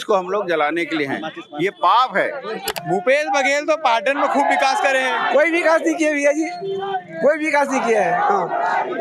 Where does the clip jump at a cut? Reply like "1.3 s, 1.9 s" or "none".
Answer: 2.7 s